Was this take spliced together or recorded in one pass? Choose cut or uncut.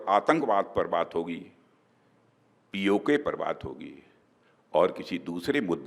uncut